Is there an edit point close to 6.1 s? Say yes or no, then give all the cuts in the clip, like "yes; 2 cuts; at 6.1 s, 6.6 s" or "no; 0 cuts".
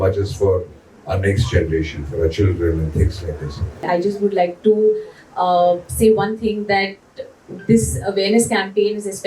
no; 1 cut; at 3.8 s